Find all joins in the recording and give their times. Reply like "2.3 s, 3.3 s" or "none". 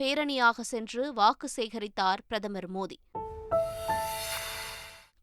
none